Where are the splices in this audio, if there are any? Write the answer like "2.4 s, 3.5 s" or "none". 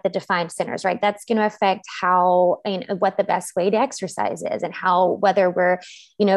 none